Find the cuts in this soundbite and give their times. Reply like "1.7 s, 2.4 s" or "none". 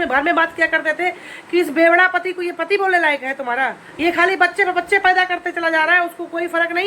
3.8 s